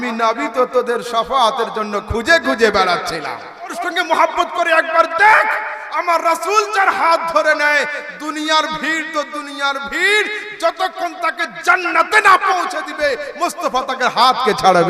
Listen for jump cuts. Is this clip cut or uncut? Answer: cut